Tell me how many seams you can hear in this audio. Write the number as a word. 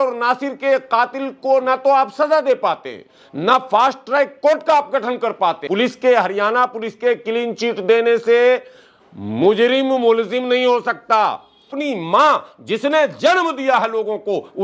two